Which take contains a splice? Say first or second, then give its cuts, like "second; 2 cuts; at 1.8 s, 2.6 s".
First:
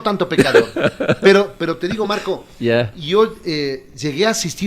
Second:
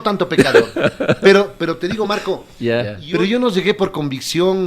second; 1 cut; at 3.0 s